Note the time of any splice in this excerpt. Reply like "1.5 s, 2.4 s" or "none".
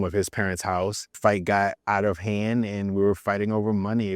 1.2 s